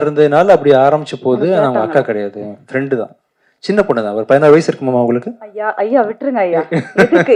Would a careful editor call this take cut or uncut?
uncut